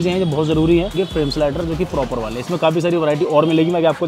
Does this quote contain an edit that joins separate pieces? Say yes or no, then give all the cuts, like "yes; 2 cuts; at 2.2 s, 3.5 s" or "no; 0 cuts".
yes; 1 cut; at 0.9 s